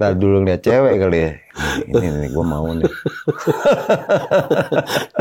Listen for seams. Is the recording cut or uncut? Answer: uncut